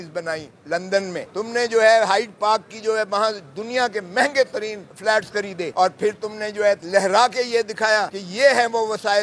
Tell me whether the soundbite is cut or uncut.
cut